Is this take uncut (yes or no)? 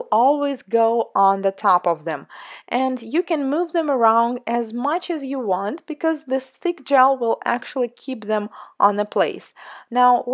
no